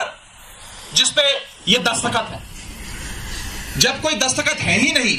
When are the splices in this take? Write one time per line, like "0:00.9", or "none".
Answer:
none